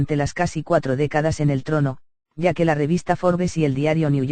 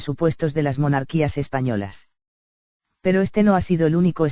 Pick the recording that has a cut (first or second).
first